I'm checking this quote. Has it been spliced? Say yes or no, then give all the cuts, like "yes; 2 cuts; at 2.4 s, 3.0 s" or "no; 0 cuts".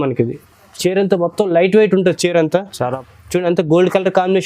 yes; 1 cut; at 3.0 s